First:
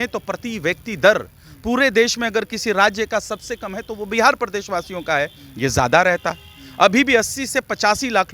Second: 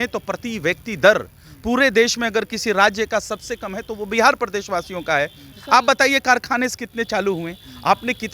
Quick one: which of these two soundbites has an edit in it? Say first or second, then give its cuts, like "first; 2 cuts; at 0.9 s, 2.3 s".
second; 1 cut; at 5.4 s